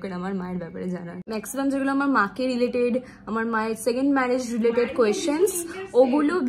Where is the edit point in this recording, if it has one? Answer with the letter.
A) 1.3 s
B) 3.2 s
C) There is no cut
A